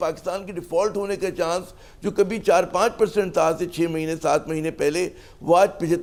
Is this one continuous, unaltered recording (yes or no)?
yes